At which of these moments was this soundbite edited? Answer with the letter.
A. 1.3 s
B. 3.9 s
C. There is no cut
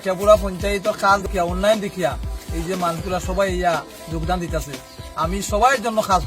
A